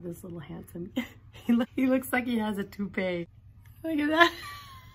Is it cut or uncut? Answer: cut